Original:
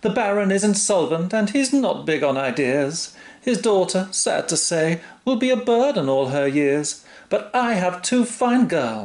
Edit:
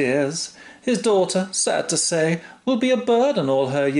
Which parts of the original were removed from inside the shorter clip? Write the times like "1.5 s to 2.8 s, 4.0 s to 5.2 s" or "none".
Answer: none